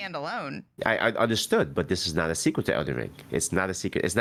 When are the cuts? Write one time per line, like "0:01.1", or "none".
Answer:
none